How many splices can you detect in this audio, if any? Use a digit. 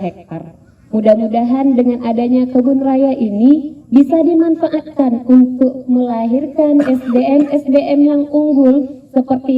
0